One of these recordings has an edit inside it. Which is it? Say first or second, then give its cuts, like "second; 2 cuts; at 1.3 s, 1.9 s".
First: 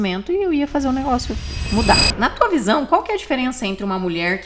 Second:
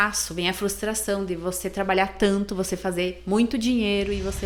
first; 1 cut; at 2.1 s